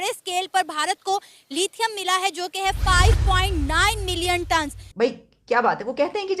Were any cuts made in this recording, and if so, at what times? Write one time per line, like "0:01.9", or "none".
0:04.8